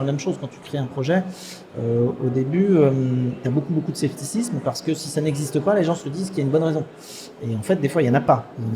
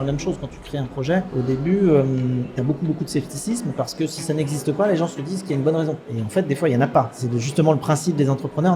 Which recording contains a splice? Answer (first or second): second